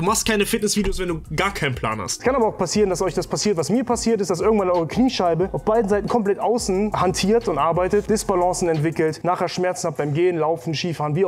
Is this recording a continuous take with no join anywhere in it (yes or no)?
no